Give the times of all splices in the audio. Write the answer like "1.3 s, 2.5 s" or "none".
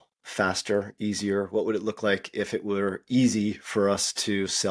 none